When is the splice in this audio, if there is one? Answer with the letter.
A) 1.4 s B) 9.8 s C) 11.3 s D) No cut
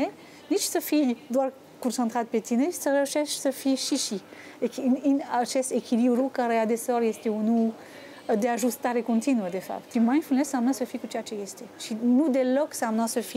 B